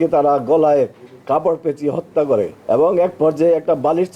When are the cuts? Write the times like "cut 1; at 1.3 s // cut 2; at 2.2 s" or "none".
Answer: cut 1; at 2.6 s

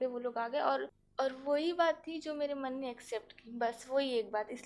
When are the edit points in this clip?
cut 1; at 1.0 s

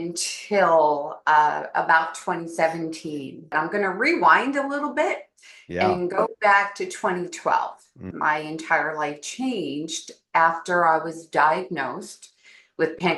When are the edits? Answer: cut 1; at 3.5 s // cut 2; at 8.1 s

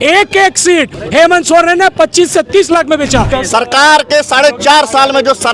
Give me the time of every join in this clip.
cut 1; at 3.3 s

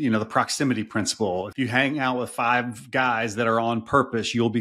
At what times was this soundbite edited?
cut 1; at 1.5 s

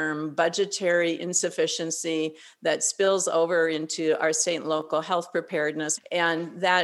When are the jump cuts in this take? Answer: cut 1; at 5.9 s

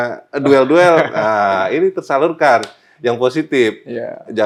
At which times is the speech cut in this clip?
none

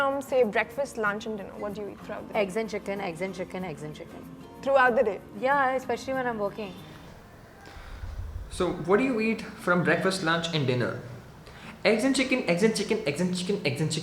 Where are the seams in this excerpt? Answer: none

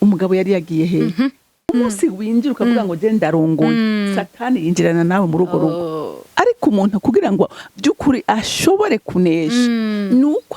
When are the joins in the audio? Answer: cut 1; at 1.7 s

